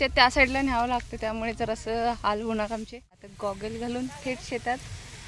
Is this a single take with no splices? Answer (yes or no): no